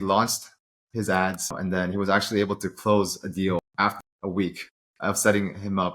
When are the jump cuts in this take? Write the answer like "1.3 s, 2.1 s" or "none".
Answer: 1.5 s, 3.9 s